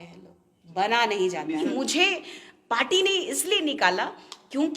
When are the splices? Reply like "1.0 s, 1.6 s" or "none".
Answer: 1.6 s